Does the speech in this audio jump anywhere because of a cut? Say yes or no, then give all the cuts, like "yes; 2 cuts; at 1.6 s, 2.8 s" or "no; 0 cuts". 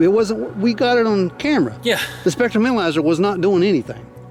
no; 0 cuts